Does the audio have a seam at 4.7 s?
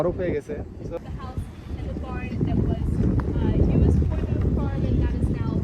no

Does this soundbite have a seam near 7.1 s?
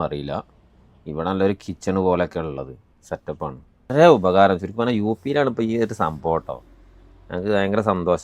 no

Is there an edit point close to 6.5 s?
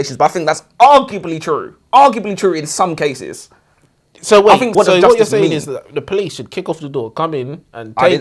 no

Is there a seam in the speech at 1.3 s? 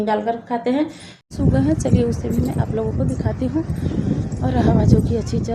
yes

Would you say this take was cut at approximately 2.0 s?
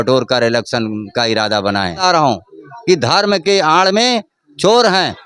yes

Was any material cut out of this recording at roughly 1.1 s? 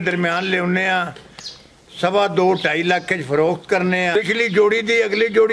no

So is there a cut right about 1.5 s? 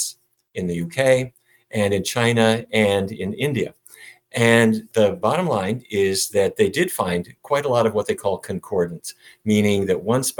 no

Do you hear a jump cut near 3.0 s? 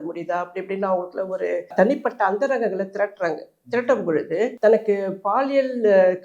no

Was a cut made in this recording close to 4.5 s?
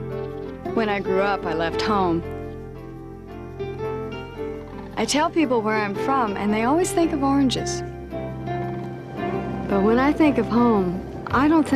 yes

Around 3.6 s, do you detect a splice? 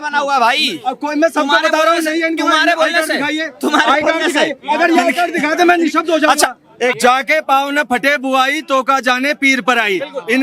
no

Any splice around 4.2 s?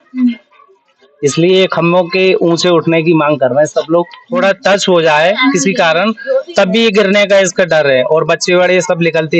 yes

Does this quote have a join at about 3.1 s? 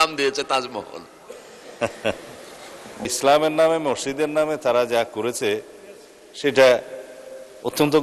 yes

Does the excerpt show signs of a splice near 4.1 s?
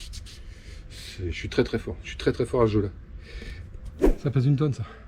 yes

